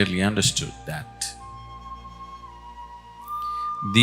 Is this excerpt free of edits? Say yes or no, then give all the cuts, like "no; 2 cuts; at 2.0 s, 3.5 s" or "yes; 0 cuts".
yes; 0 cuts